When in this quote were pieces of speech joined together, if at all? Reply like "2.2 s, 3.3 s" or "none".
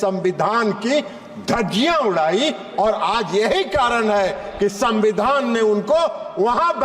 none